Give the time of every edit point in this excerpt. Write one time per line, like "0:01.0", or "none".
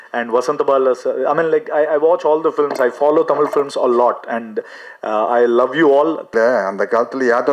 0:06.3